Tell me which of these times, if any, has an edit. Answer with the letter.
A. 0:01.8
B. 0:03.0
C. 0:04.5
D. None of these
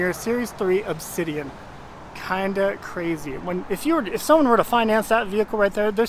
D